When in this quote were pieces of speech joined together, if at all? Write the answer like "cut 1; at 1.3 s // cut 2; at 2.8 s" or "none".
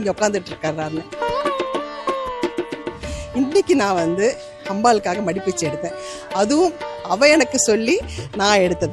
cut 1; at 0.9 s